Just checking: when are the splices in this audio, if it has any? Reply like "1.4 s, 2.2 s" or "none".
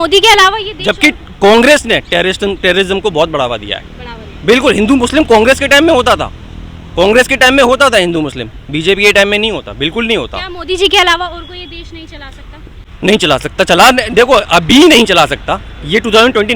12.8 s